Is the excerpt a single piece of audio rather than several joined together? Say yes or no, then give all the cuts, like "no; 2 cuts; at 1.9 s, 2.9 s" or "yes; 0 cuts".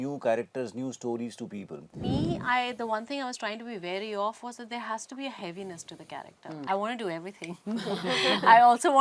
no; 2 cuts; at 2.1 s, 6.6 s